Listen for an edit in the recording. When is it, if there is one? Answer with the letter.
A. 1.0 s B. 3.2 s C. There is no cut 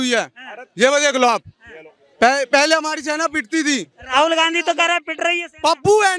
C